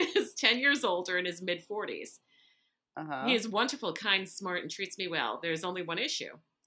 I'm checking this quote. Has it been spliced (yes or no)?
no